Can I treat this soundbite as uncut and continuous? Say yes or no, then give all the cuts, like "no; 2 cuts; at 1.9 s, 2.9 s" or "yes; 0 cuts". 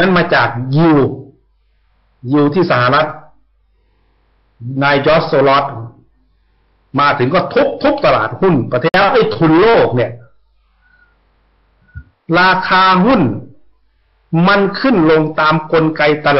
yes; 0 cuts